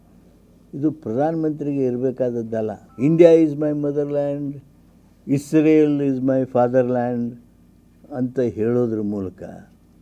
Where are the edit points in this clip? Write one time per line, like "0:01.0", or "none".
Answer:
0:02.8